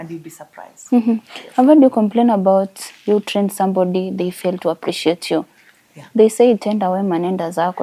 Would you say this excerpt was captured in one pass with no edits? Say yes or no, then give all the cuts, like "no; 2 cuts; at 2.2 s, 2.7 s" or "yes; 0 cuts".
yes; 0 cuts